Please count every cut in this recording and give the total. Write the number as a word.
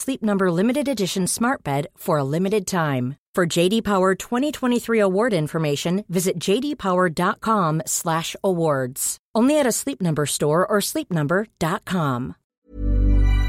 one